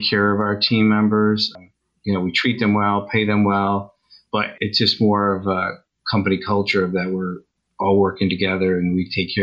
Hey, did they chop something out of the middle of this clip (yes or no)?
no